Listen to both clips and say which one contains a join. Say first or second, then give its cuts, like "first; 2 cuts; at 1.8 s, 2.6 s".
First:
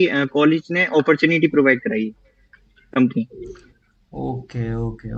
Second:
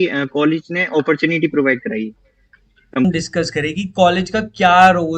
second; 1 cut; at 3.0 s